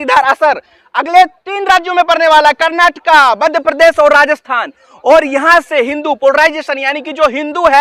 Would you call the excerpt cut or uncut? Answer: uncut